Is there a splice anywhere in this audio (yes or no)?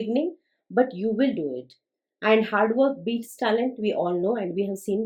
no